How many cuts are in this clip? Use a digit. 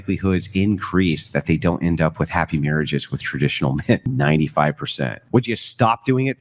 1